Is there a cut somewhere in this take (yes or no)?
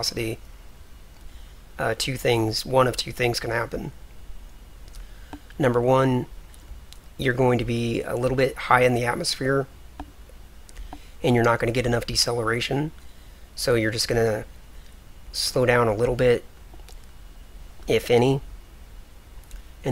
yes